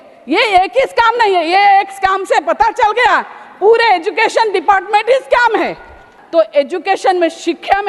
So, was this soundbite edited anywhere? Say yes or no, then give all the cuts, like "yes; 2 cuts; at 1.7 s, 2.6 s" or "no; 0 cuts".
yes; 1 cut; at 6.1 s